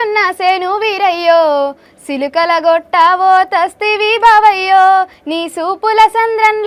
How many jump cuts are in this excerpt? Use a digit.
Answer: 0